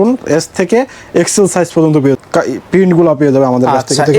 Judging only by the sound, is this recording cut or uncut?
cut